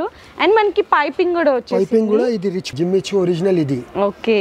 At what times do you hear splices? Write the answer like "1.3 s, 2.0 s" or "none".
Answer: 2.7 s